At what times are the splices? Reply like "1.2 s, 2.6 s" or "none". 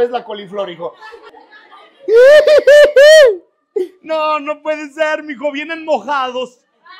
1.3 s